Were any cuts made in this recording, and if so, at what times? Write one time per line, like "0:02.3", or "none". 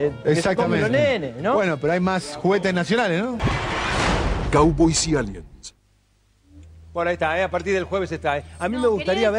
0:03.4